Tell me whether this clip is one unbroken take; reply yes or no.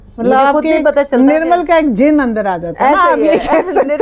yes